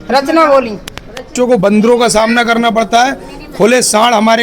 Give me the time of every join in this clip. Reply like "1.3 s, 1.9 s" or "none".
1.3 s